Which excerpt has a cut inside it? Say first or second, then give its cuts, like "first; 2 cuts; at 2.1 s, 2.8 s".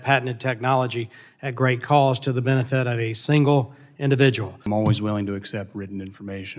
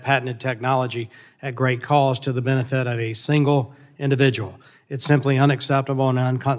first; 1 cut; at 4.6 s